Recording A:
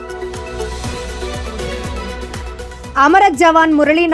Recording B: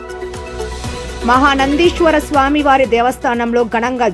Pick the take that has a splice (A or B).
A